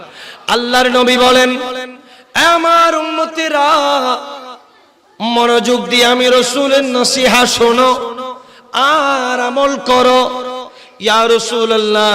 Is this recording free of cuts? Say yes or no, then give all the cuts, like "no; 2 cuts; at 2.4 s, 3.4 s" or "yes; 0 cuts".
yes; 0 cuts